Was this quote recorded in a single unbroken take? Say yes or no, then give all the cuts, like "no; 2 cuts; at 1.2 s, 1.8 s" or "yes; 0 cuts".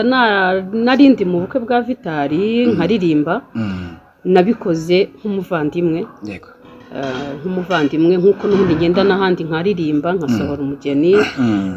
yes; 0 cuts